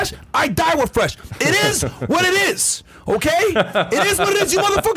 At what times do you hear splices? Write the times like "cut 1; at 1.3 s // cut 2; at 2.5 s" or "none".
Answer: none